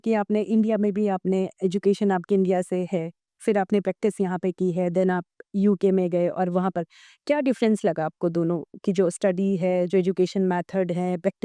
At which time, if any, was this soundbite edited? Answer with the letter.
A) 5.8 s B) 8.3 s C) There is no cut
C